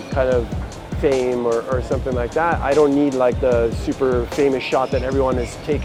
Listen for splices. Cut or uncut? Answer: uncut